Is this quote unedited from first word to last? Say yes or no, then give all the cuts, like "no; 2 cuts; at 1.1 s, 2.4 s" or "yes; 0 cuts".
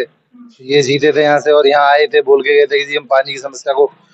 yes; 0 cuts